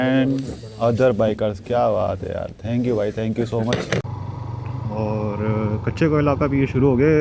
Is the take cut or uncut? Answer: cut